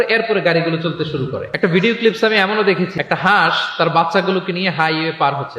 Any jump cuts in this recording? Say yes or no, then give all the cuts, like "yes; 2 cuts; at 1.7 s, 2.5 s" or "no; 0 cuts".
yes; 1 cut; at 1.4 s